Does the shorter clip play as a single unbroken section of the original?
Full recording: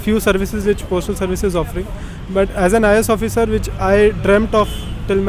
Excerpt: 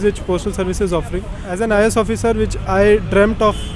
no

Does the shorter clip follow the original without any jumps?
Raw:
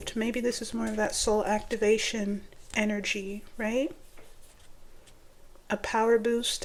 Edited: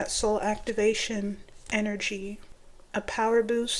no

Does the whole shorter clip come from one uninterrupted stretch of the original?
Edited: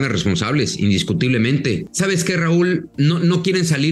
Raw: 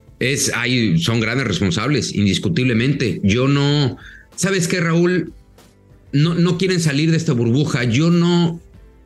no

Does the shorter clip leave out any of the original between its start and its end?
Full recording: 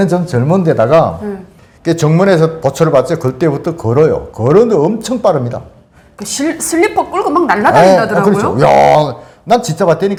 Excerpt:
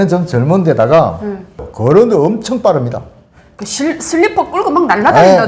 yes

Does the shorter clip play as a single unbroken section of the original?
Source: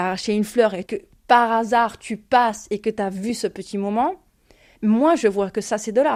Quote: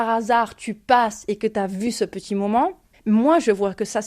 no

